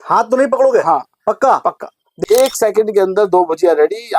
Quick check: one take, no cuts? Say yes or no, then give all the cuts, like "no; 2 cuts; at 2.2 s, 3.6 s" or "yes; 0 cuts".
no; 1 cut; at 2.2 s